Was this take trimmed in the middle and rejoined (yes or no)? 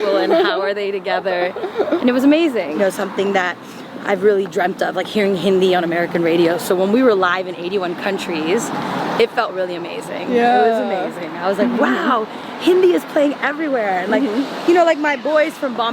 yes